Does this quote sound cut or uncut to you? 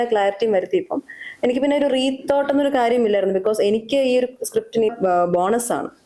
cut